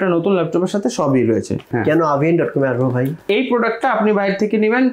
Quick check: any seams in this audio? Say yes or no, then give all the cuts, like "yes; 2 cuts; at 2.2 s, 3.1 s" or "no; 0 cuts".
yes; 2 cuts; at 1.7 s, 3.3 s